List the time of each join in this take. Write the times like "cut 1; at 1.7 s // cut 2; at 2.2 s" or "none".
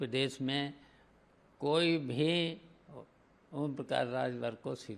none